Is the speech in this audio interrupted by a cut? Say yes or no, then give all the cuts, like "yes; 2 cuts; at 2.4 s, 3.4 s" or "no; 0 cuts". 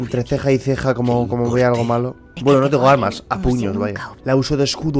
yes; 2 cuts; at 2.2 s, 4.1 s